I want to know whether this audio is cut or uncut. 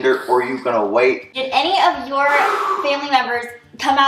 cut